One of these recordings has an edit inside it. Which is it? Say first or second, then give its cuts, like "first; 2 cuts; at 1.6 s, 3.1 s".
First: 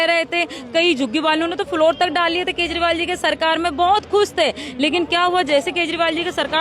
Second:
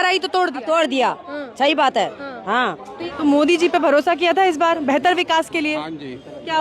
second; 1 cut; at 3.1 s